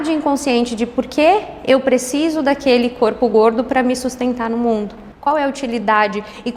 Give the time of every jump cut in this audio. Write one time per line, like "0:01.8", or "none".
none